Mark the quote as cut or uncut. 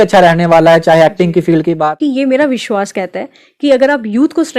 cut